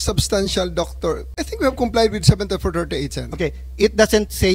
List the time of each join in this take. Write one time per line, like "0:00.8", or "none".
0:01.5